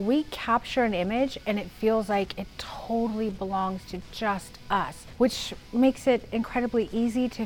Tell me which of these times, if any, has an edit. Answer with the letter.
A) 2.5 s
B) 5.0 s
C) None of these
B